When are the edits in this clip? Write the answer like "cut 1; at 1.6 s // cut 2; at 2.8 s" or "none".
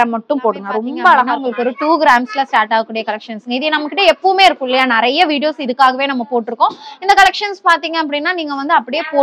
cut 1; at 1.4 s

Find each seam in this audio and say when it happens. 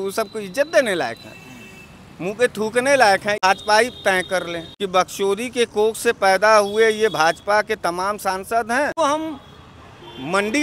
cut 1; at 3.4 s // cut 2; at 4.6 s // cut 3; at 8.9 s

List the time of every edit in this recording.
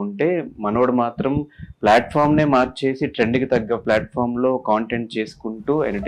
none

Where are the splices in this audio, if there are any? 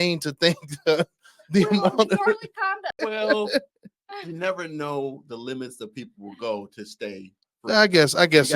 cut 1; at 2.9 s

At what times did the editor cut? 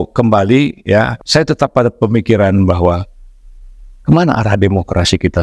cut 1; at 1.2 s

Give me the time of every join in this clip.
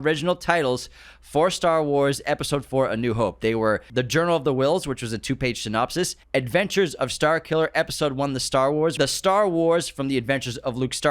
cut 1; at 3.9 s // cut 2; at 6.2 s // cut 3; at 8.9 s

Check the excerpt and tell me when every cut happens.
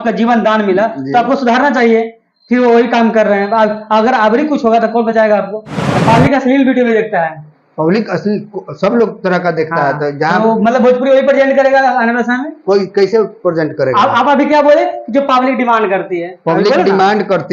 cut 1; at 5.9 s

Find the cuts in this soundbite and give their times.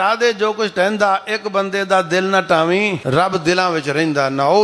cut 1; at 3.0 s

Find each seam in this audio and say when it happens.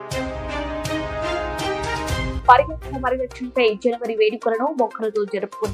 cut 1; at 2.3 s

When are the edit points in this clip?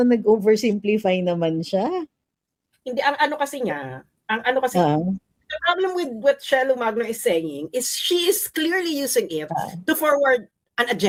none

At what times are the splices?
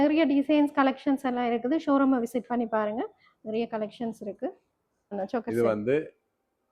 cut 1; at 5.2 s

